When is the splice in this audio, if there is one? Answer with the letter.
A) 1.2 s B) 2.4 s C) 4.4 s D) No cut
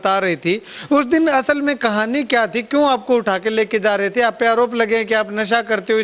D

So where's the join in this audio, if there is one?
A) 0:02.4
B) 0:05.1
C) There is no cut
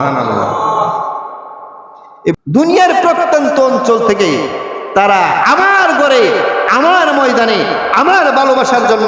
A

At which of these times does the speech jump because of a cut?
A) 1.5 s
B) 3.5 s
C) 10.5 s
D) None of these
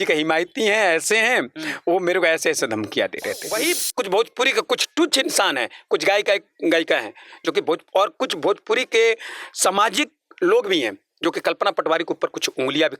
B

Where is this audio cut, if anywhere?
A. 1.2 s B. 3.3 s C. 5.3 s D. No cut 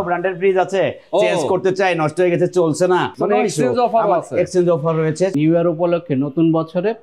C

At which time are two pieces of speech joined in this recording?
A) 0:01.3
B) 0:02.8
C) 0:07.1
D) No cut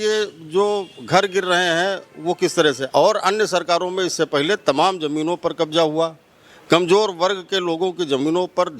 B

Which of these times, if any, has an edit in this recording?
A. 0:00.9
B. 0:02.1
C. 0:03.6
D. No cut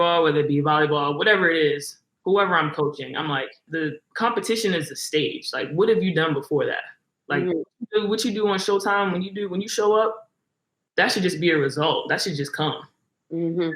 C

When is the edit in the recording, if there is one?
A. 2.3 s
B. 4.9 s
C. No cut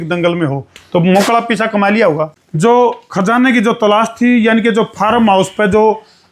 A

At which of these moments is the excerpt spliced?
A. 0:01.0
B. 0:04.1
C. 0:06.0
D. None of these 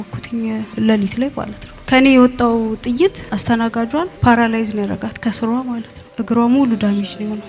D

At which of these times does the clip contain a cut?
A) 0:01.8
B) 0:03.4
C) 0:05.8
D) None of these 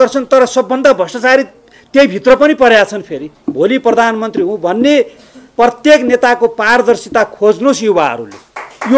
B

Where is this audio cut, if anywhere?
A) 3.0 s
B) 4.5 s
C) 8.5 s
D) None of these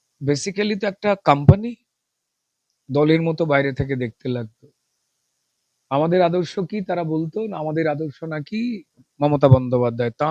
D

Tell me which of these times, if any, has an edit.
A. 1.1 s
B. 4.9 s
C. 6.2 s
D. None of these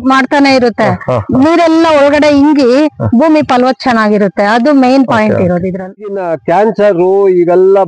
C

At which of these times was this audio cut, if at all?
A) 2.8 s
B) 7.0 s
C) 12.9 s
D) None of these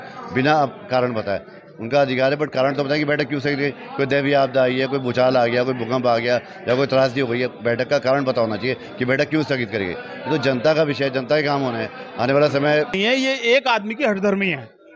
C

